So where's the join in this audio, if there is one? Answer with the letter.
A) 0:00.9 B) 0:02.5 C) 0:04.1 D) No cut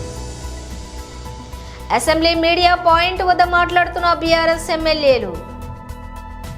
A